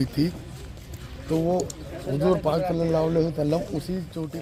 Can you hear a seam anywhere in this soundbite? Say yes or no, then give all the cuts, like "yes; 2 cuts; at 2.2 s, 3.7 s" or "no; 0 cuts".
no; 0 cuts